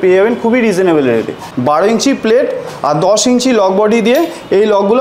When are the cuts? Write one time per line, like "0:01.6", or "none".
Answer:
0:01.5

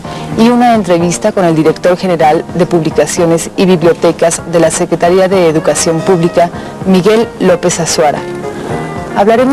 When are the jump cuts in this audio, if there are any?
0:07.9

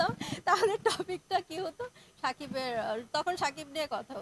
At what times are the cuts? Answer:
none

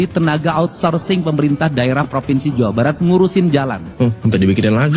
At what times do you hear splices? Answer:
0:03.9

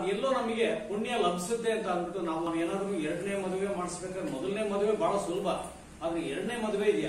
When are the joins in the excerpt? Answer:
0:02.5

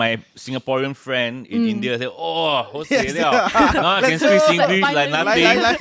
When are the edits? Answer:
none

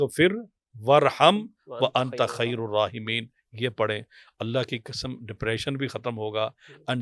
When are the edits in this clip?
none

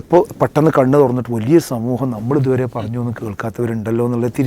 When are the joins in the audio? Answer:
none

